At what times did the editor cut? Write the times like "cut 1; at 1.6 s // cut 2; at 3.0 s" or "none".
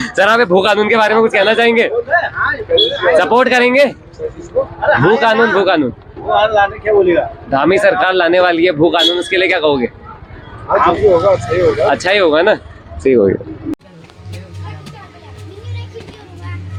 none